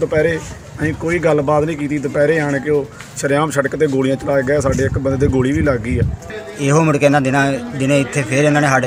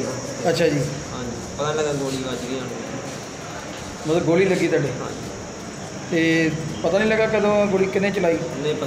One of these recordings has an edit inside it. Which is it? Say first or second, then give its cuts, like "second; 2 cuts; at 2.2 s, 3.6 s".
first; 1 cut; at 6.4 s